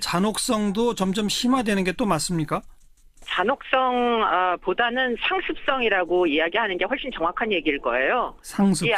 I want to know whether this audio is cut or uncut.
cut